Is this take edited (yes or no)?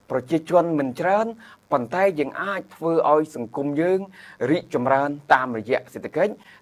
no